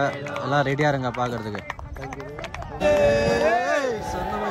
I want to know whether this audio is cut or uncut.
cut